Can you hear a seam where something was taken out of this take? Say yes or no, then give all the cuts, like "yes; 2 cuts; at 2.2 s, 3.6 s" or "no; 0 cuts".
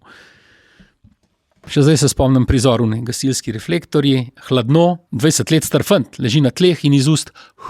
yes; 2 cuts; at 1.7 s, 5.1 s